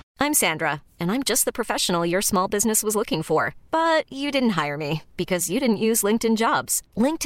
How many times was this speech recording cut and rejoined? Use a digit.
0